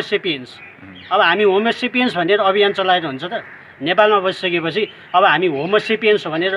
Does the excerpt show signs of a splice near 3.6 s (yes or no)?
no